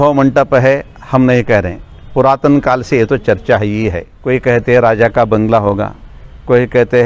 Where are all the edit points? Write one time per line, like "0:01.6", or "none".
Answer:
0:04.1